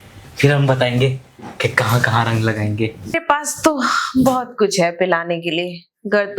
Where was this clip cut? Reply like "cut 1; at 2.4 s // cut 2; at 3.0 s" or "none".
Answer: cut 1; at 3.1 s